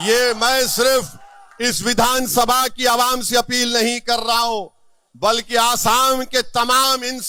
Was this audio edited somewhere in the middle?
no; 0 cuts

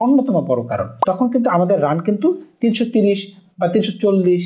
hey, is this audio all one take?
no; 1 cut; at 0.9 s

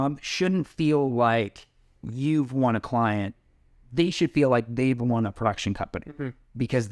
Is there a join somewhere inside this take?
no; 0 cuts

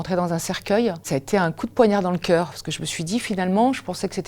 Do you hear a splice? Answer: yes; 1 cut; at 1.0 s

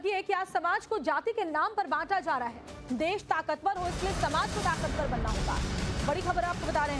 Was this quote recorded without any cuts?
yes; 0 cuts

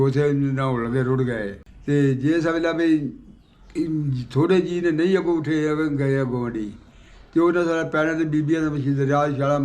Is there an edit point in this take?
yes; 1 cut; at 1.8 s

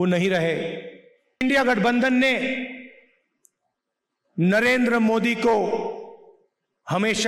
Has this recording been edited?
yes; 1 cut; at 1.4 s

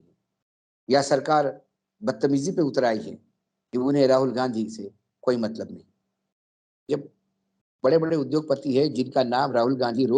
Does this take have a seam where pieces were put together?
yes; 1 cut; at 6.9 s

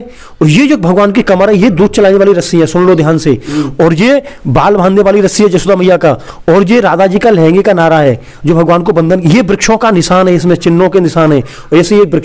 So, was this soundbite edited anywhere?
no; 0 cuts

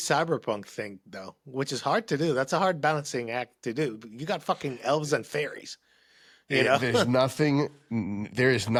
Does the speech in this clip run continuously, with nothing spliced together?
yes; 0 cuts

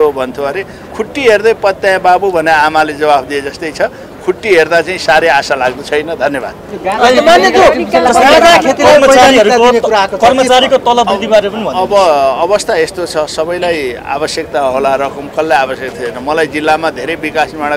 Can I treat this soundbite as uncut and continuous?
yes; 0 cuts

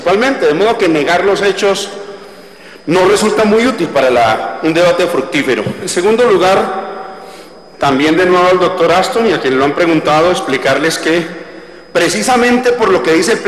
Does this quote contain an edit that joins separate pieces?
yes; 1 cut; at 8.9 s

